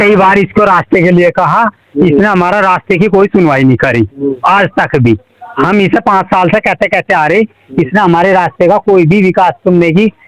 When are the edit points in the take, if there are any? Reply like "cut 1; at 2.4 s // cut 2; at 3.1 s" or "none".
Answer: none